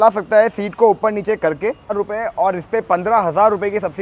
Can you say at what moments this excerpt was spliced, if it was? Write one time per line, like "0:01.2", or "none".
0:01.9